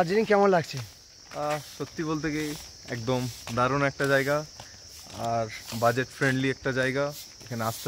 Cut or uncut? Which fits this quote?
uncut